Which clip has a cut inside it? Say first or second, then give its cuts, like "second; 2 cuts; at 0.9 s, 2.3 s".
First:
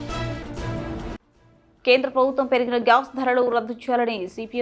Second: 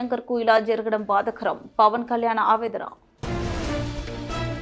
first; 1 cut; at 1.1 s